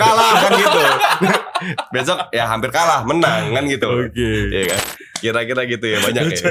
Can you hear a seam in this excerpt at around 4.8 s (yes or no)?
yes